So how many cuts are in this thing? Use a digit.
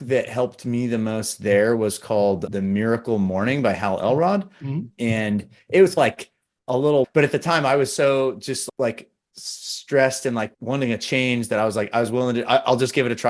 0